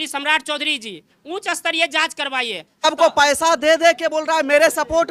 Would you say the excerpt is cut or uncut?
cut